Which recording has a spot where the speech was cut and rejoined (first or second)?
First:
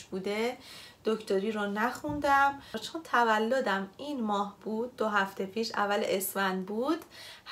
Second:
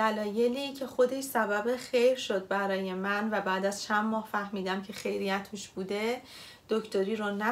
first